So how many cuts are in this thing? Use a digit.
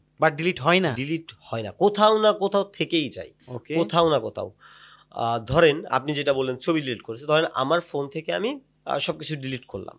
0